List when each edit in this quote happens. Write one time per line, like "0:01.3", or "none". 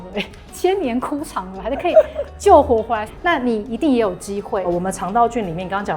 0:04.7

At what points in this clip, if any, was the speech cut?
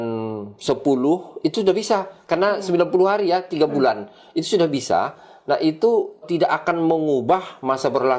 0:06.2

